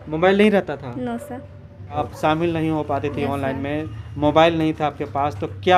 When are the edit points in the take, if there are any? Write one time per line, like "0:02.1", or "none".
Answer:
0:02.0